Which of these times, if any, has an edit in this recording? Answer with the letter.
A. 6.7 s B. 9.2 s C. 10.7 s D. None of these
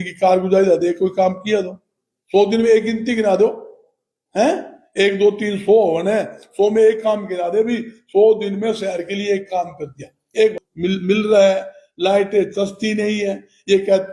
C